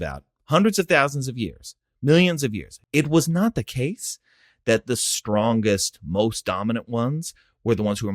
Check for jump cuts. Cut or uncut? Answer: cut